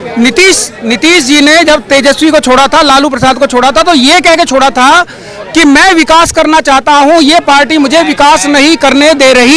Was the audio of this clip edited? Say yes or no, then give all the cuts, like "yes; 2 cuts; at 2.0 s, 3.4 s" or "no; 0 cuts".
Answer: no; 0 cuts